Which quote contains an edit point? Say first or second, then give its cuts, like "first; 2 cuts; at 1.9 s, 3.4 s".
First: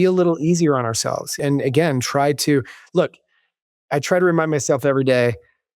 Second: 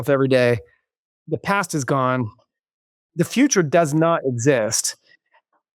first; 1 cut; at 1.4 s